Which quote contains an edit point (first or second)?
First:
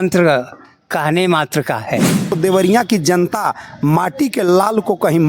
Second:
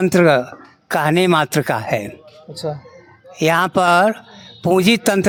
first